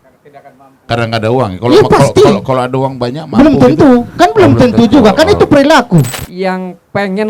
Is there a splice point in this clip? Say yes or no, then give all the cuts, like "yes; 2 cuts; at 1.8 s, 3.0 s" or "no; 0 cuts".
yes; 1 cut; at 6.2 s